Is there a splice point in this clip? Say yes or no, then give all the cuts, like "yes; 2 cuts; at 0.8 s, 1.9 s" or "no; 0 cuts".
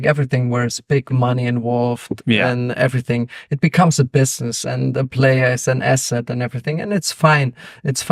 no; 0 cuts